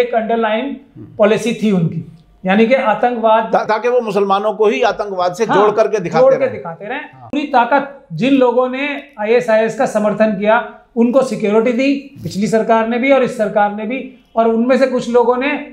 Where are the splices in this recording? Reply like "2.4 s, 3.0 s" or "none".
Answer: 7.3 s

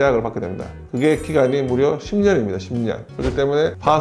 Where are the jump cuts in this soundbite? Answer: none

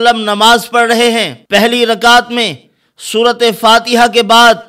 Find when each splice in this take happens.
1.3 s

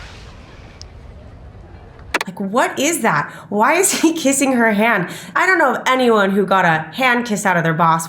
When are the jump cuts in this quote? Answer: 2.1 s, 5.2 s

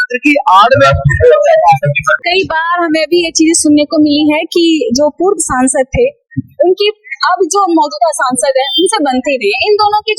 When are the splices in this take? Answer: 2.0 s

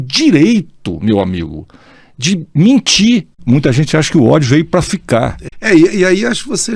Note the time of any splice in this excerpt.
3.3 s, 5.4 s

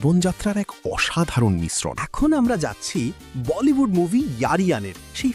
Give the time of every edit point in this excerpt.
2.0 s

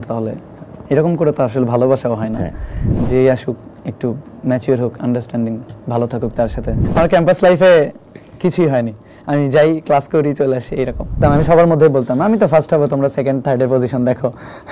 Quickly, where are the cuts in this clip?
2.9 s, 6.8 s, 11.2 s

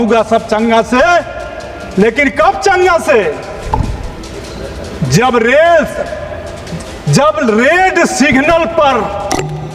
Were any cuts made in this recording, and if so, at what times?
none

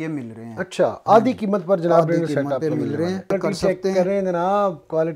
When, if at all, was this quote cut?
3.3 s

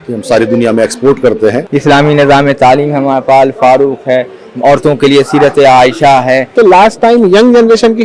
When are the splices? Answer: 1.6 s, 6.5 s

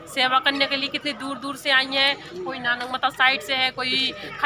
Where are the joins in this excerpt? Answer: none

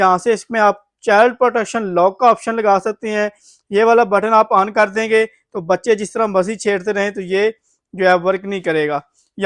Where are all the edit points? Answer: none

